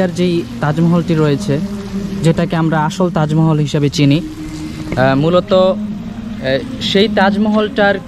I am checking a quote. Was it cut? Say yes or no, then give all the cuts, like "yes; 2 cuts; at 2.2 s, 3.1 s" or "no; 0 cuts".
no; 0 cuts